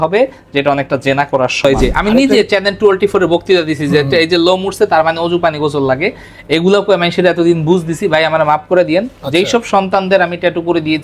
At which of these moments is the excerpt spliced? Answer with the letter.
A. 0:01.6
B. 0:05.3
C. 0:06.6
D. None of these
A